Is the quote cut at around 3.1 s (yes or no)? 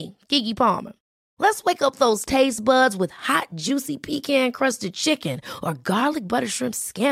no